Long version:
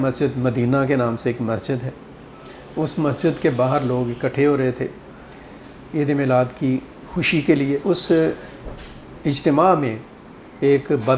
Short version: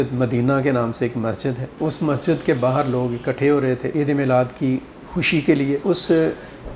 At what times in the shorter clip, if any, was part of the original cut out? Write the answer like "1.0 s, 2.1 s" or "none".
1.7 s, 3.9 s